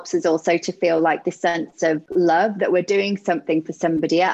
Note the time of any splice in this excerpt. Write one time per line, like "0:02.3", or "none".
0:02.1